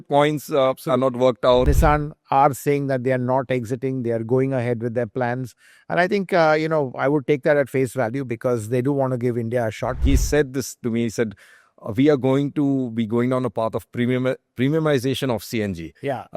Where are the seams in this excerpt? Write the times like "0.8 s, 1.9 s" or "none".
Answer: 1.7 s, 10.0 s